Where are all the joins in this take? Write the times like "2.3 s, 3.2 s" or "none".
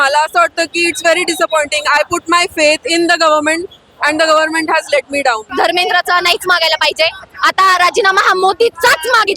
5.5 s

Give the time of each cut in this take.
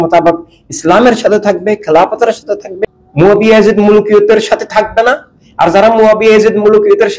2.7 s

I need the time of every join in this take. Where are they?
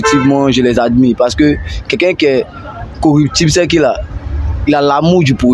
none

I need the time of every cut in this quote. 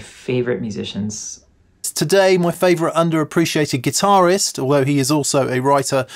1.9 s

